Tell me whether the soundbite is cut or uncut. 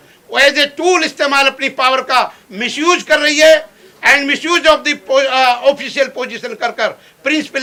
uncut